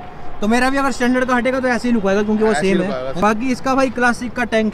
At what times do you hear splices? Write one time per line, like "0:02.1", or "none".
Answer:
0:03.2